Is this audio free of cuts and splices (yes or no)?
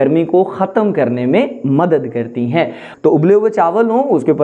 no